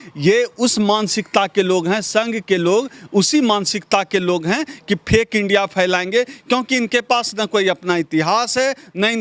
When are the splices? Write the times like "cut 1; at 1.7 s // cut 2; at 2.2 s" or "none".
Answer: none